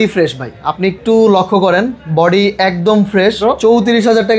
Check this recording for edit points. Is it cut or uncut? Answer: cut